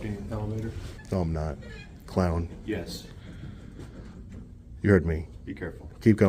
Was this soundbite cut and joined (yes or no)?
yes